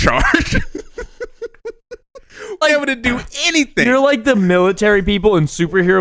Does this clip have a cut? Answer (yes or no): yes